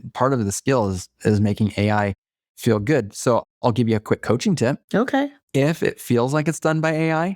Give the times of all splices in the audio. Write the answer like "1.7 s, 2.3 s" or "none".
5.1 s